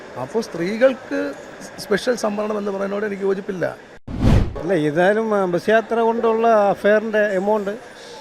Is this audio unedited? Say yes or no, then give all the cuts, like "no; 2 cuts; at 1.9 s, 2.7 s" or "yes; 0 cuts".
no; 1 cut; at 4.3 s